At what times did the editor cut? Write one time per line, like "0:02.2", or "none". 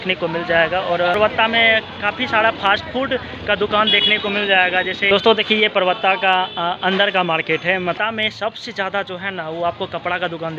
0:01.1
0:05.1
0:08.0